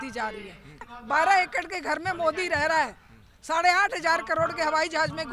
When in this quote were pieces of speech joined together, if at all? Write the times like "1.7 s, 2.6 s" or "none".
0.9 s